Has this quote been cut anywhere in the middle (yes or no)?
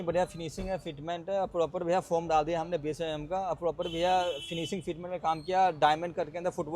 no